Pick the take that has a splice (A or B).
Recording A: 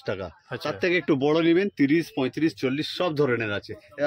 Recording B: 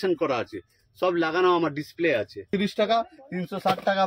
B